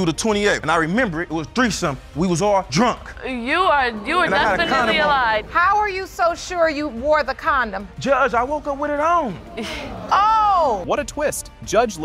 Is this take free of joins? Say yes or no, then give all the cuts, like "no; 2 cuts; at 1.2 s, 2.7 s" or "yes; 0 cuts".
yes; 0 cuts